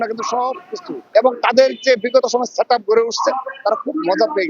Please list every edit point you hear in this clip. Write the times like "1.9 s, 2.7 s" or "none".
1.0 s